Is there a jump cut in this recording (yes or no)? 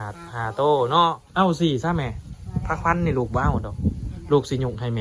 yes